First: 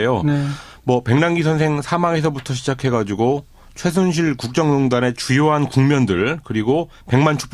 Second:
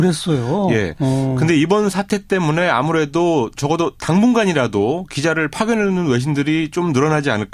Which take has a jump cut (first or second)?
second